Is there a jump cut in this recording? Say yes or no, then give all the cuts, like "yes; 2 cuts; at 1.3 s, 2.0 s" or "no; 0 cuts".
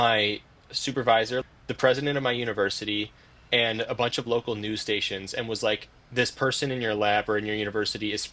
yes; 1 cut; at 1.4 s